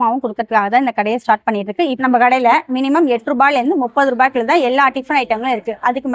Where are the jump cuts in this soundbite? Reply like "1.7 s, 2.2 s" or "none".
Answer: 2.0 s